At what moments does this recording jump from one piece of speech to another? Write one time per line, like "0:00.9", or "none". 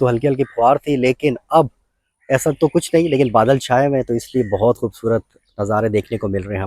none